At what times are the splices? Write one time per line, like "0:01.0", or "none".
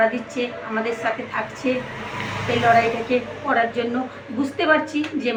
none